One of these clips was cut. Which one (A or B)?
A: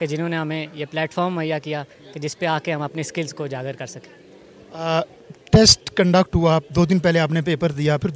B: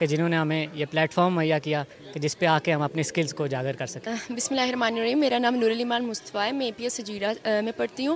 B